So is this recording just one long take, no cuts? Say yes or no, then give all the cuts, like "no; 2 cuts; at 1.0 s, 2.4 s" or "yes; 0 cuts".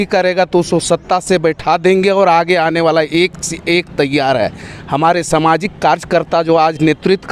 yes; 0 cuts